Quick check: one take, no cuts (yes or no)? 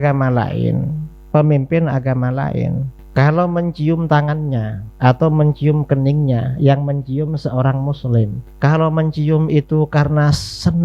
no